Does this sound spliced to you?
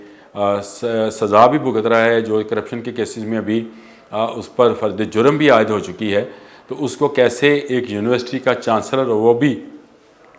no; 0 cuts

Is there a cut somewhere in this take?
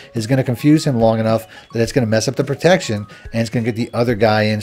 no; 0 cuts

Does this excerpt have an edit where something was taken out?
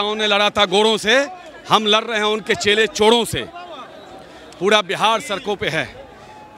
no; 0 cuts

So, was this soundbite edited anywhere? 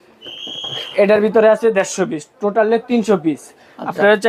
no; 0 cuts

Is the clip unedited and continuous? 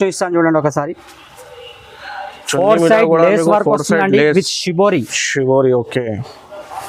yes; 0 cuts

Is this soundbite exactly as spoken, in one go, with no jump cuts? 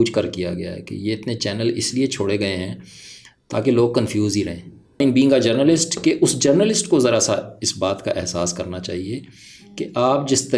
no; 1 cut; at 5.0 s

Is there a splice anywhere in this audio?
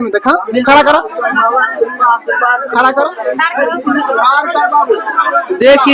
no; 0 cuts

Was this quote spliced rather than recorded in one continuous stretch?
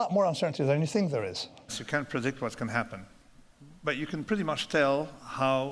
yes; 1 cut; at 1.8 s

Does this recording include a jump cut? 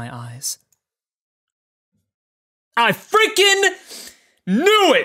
no; 0 cuts

